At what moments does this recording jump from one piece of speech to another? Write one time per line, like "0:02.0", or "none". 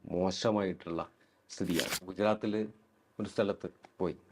0:02.1

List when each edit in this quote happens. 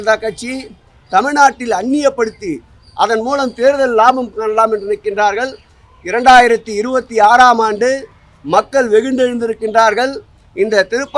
none

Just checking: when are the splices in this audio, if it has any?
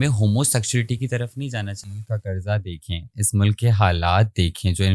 0:01.8

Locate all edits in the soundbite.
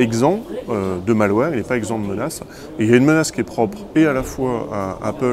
none

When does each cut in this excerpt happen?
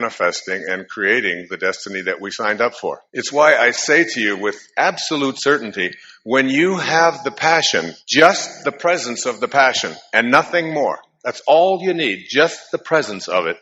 0:03.0

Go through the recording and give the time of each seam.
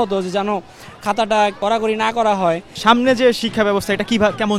0:02.7

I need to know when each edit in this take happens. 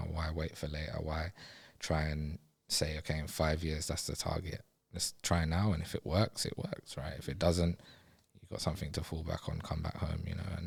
none

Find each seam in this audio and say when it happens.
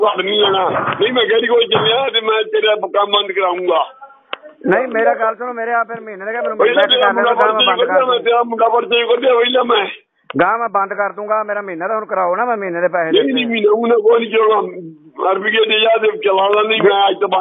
none

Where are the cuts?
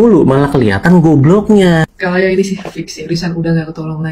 0:01.7

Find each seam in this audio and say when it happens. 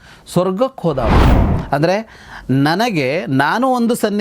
0:01.3

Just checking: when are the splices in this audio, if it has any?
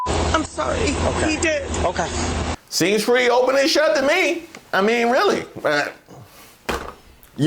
0:02.5

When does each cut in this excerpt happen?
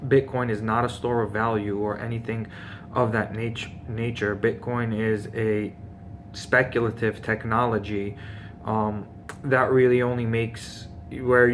none

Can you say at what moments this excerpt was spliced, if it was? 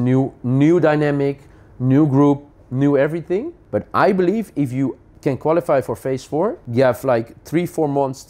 0:03.6
0:05.1
0:06.6

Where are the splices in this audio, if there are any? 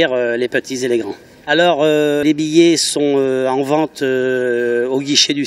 none

